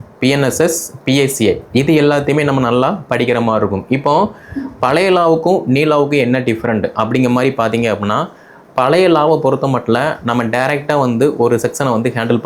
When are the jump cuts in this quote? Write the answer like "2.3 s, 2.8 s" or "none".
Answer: none